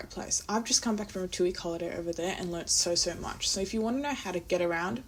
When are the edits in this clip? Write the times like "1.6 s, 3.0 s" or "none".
none